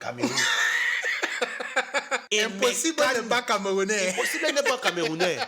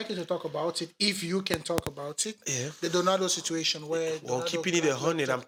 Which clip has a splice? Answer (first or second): first